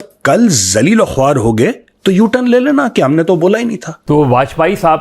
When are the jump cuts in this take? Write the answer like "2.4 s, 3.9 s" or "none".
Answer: 3.9 s